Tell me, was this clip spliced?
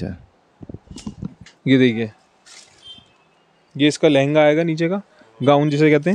yes; 1 cut; at 1.5 s

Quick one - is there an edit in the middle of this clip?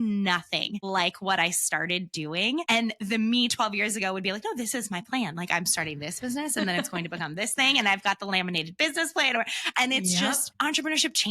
yes; 3 cuts; at 0.8 s, 2.6 s, 10.5 s

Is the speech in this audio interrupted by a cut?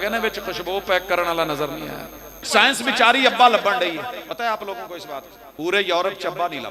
yes; 3 cuts; at 2.4 s, 4.3 s, 5.4 s

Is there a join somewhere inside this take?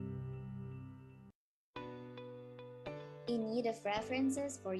yes; 1 cut; at 1.3 s

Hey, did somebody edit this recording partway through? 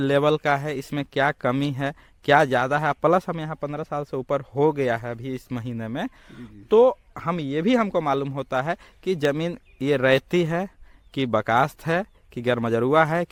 no; 0 cuts

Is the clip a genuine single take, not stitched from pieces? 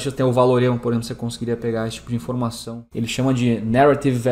no; 1 cut; at 2.9 s

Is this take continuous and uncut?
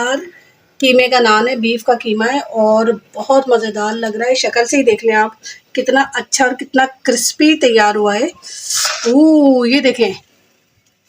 no; 1 cut; at 10.1 s

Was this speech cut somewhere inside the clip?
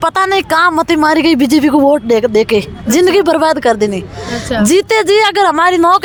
no; 0 cuts

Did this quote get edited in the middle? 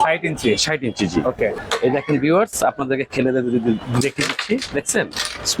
yes; 1 cut; at 1.6 s

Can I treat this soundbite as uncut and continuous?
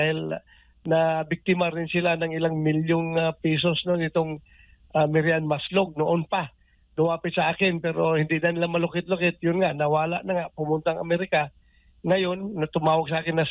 yes; 0 cuts

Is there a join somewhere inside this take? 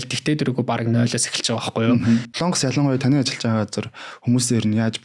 yes; 1 cut; at 2.3 s

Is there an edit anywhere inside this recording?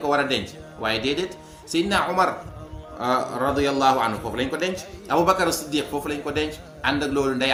no; 0 cuts

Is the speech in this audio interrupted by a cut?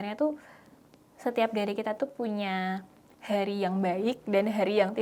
no; 0 cuts

